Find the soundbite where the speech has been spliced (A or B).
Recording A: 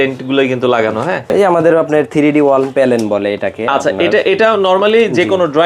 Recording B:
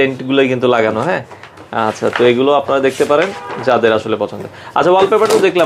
A